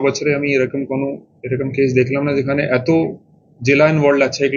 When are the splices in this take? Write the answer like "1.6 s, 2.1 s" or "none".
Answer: none